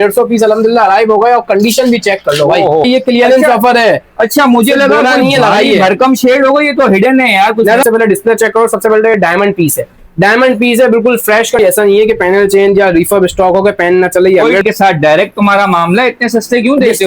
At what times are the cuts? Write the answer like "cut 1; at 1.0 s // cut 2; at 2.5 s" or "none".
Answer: cut 1; at 2.9 s // cut 2; at 7.8 s // cut 3; at 11.6 s // cut 4; at 14.6 s